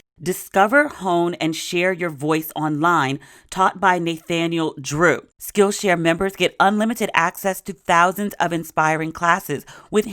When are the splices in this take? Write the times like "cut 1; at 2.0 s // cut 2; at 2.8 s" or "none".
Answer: cut 1; at 5.3 s